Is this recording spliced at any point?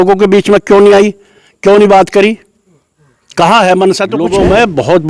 yes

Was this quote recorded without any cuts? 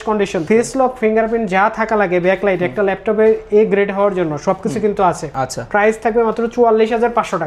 yes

